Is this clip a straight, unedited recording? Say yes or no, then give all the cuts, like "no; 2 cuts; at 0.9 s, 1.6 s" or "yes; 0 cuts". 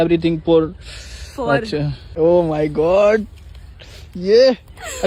yes; 0 cuts